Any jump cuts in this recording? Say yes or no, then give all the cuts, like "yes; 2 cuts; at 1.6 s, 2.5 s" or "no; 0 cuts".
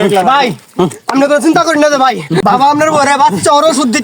yes; 1 cut; at 2.4 s